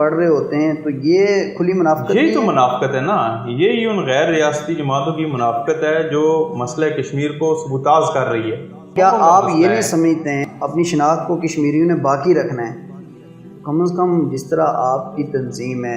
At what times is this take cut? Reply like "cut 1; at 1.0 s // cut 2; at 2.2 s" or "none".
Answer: cut 1; at 8.9 s // cut 2; at 10.4 s

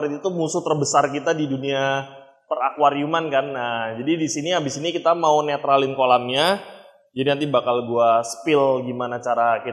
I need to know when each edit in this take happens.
none

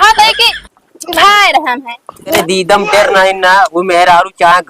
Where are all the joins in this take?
cut 1; at 2.3 s

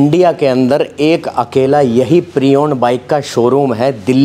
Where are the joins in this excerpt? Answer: none

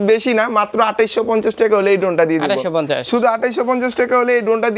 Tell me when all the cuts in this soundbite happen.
none

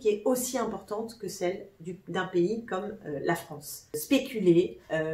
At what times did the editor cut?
cut 1; at 4.0 s

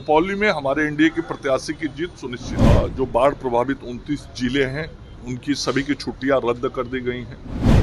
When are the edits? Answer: cut 1; at 2.5 s

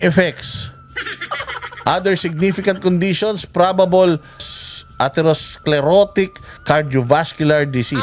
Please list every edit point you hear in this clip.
cut 1; at 4.5 s

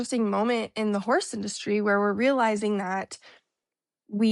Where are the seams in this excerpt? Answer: none

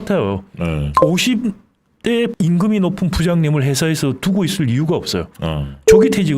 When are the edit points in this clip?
cut 1; at 2.3 s

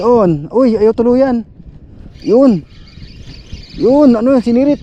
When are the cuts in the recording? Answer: none

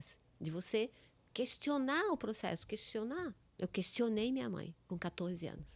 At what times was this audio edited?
cut 1; at 3.4 s // cut 2; at 4.8 s

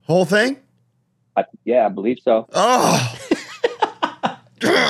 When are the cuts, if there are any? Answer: none

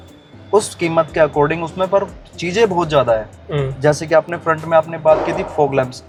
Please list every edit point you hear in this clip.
none

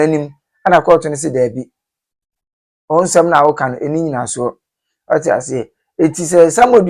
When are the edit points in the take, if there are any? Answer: none

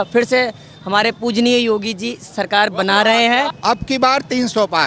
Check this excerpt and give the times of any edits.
cut 1; at 3.5 s

